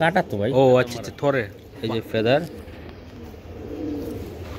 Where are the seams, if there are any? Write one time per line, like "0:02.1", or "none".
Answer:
0:02.0